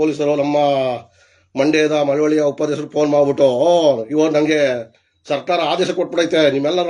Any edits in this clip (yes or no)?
no